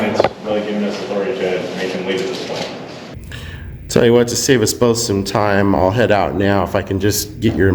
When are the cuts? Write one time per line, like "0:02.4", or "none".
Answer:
0:03.1